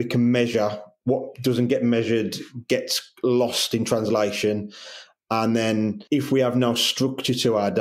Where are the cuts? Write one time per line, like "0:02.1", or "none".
0:06.0